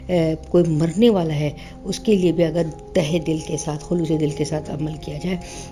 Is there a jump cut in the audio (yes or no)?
no